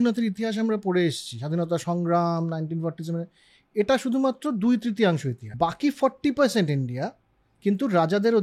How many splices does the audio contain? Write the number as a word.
one